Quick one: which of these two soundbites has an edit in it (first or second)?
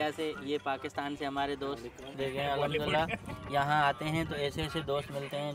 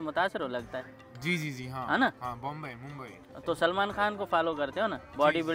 first